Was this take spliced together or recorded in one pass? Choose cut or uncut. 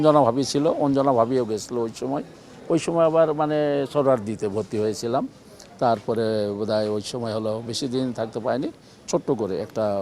uncut